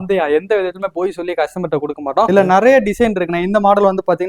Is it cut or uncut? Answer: cut